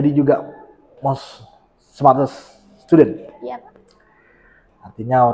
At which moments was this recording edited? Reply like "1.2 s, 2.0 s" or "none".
none